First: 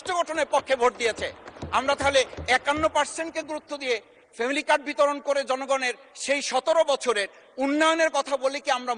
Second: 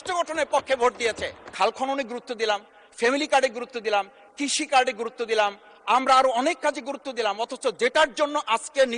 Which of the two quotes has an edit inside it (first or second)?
second